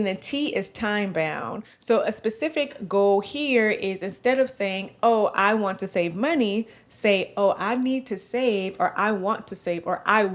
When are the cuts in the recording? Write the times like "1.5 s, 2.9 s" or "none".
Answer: none

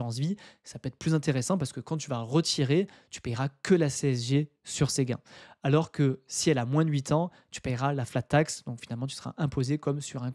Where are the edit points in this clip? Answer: none

